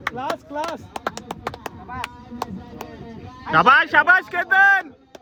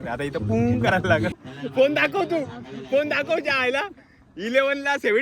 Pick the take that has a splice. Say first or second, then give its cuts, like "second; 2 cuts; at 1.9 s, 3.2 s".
second; 1 cut; at 1.4 s